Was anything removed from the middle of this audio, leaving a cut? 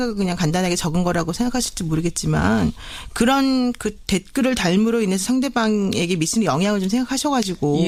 no; 0 cuts

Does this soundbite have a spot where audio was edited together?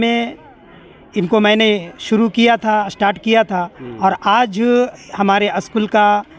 no; 0 cuts

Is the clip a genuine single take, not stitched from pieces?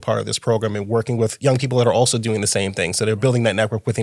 no; 1 cut; at 1.3 s

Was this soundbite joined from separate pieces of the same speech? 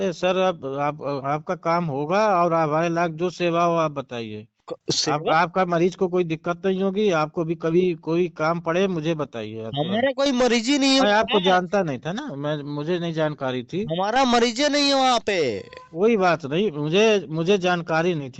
no; 0 cuts

